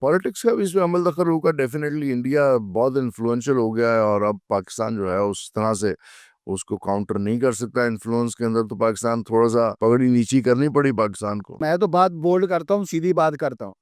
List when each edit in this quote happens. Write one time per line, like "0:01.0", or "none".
0:09.7
0:11.6

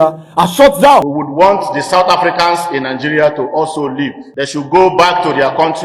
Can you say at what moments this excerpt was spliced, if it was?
0:01.1
0:04.2

